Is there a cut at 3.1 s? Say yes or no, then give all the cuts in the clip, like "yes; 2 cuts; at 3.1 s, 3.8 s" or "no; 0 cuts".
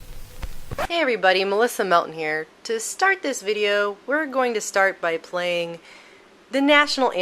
yes; 1 cut; at 3.1 s